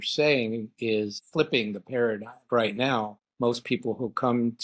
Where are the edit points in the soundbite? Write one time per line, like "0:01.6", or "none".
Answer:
0:01.2
0:02.5
0:03.2

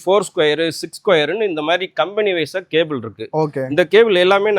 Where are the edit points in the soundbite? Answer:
none

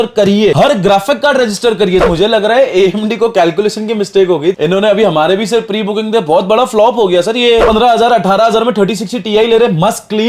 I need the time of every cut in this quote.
0:02.0
0:07.6

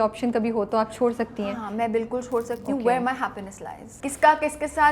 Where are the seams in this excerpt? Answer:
0:03.9

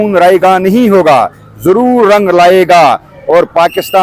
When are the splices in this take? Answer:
none

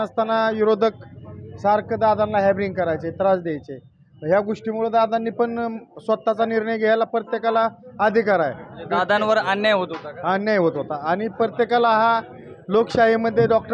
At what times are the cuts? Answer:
none

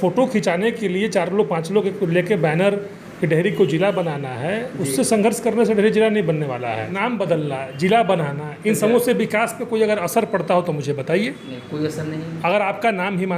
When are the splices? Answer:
0:07.0

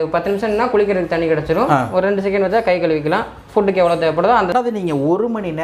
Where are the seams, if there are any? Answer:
0:04.5

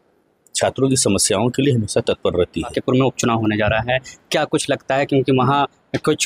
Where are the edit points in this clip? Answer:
0:02.8

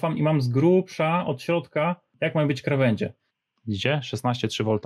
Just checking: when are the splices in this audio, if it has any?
0:02.1
0:03.3

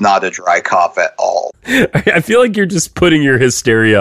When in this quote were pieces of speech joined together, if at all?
0:01.7

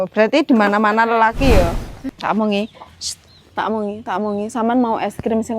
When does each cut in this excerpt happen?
0:02.0

